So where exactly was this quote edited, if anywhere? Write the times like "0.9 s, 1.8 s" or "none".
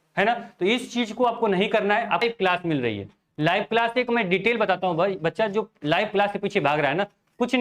2.2 s